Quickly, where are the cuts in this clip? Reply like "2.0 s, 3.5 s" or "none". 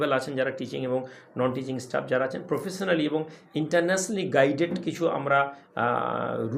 none